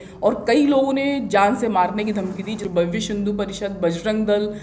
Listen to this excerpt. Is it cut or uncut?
cut